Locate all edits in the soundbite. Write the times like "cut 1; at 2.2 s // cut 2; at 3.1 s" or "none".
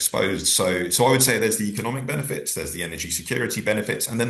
none